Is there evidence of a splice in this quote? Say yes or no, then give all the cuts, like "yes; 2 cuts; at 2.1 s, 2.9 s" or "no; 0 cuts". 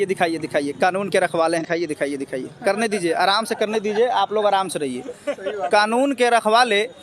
yes; 1 cut; at 1.6 s